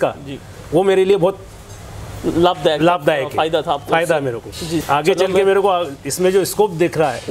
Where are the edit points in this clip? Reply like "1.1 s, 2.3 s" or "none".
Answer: 4.8 s